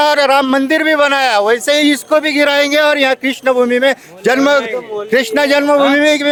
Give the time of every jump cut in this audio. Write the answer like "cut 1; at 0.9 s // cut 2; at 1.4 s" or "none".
none